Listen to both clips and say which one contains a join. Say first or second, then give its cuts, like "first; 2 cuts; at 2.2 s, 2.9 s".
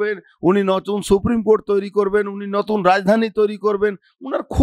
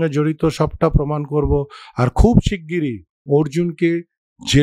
second; 1 cut; at 3.1 s